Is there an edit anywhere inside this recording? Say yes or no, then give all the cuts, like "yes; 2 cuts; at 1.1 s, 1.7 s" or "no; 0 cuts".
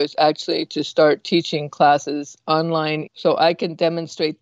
yes; 1 cut; at 3.0 s